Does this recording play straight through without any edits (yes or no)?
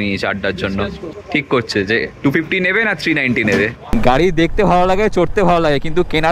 no